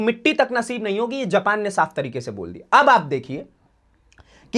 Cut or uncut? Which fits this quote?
uncut